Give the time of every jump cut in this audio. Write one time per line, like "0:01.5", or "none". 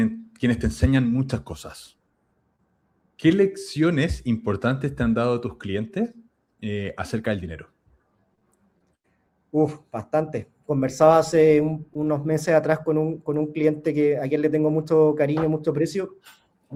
none